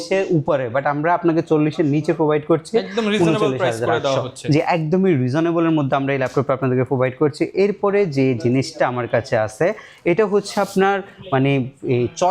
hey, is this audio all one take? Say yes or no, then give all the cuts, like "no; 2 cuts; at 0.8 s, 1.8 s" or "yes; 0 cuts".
yes; 0 cuts